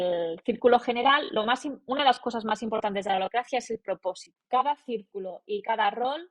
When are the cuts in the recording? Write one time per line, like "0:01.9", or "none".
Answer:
0:04.3